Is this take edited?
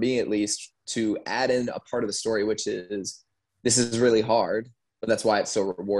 no; 0 cuts

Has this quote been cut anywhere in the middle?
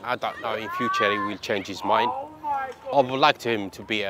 yes; 1 cut; at 2.9 s

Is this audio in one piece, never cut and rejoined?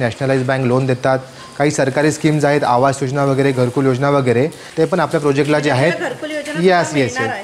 no; 1 cut; at 4.6 s

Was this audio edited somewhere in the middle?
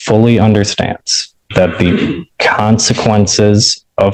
no; 0 cuts

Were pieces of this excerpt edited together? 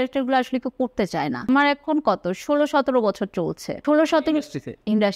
yes; 2 cuts; at 1.5 s, 3.7 s

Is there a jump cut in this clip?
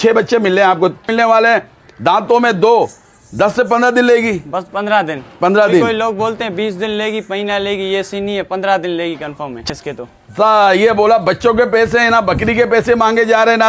yes; 2 cuts; at 1.1 s, 9.6 s

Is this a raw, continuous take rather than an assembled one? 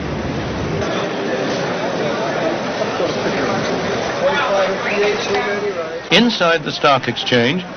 yes; 0 cuts

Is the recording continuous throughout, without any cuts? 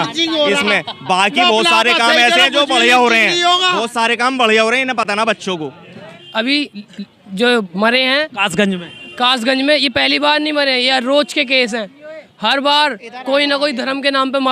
no; 1 cut; at 6.0 s

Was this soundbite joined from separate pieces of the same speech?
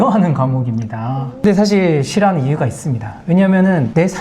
yes; 1 cut; at 1.4 s

